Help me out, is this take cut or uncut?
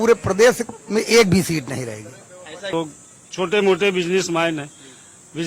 cut